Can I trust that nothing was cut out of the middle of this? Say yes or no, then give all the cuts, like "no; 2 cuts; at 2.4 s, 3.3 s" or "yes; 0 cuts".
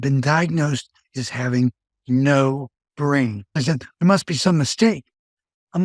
no; 1 cut; at 3.6 s